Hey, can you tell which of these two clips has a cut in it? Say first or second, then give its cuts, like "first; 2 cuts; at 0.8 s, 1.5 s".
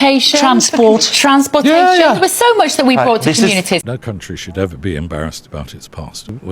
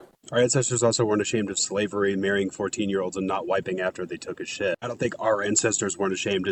first; 1 cut; at 3.9 s